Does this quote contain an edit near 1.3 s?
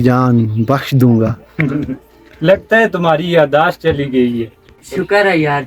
no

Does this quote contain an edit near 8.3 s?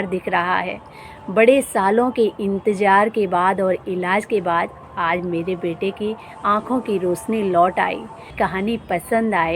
yes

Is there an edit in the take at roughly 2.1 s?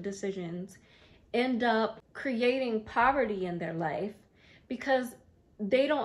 yes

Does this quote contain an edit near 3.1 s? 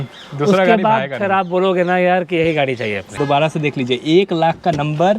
yes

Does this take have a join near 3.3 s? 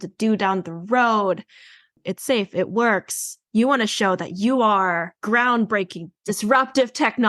yes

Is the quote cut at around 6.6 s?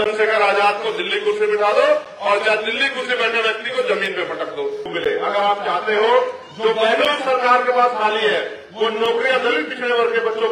no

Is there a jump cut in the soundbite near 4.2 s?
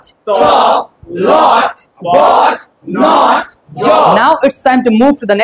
yes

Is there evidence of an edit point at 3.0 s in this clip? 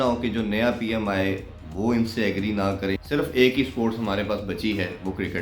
yes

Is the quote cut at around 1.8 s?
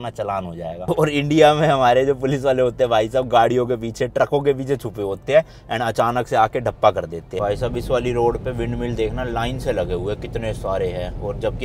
no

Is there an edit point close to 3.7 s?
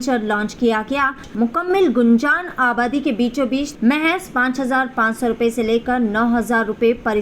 yes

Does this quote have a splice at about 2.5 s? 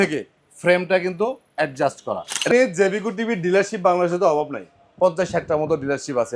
yes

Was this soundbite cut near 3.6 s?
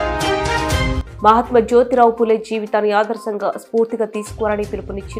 no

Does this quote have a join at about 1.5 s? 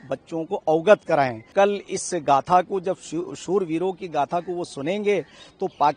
yes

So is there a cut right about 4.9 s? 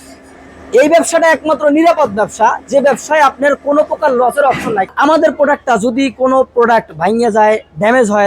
yes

